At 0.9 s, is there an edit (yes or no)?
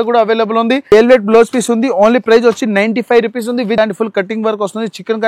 yes